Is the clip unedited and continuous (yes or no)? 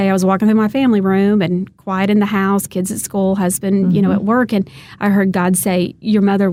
yes